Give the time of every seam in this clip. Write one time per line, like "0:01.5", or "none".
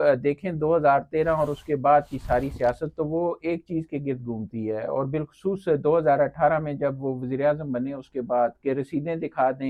none